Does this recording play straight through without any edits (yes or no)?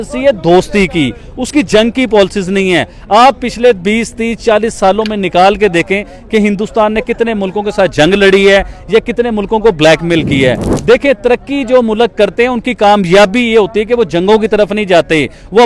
yes